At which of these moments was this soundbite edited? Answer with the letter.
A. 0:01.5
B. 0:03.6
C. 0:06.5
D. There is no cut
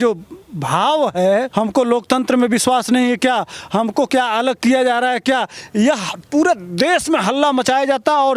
A